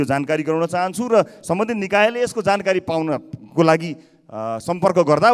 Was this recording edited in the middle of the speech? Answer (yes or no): no